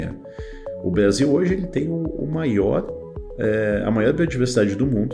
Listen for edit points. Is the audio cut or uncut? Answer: uncut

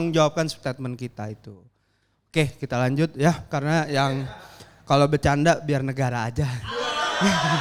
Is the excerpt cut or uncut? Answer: uncut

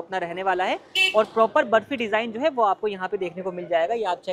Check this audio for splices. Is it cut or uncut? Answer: uncut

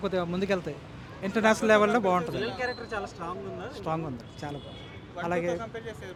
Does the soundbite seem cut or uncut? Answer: uncut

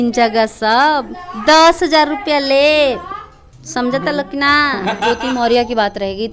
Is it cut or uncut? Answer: cut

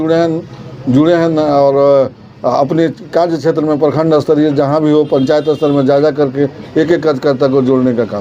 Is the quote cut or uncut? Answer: uncut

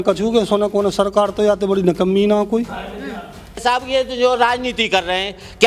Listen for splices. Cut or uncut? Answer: cut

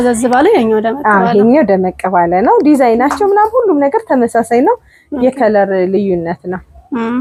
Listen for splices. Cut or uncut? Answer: uncut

